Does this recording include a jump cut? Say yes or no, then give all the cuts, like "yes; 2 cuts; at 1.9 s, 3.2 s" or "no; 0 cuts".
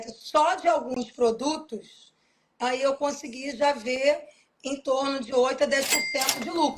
no; 0 cuts